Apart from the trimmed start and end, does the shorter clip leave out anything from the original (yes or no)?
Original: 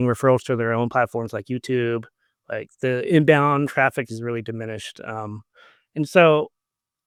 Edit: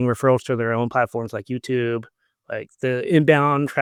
no